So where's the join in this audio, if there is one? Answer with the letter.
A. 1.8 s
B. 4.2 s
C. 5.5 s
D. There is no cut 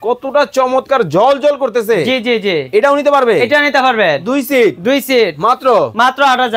D